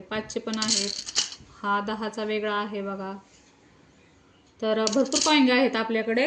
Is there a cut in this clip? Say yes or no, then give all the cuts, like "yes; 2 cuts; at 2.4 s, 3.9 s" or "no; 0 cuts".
no; 0 cuts